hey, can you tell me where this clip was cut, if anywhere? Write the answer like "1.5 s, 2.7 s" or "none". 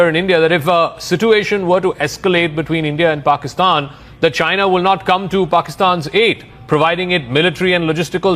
none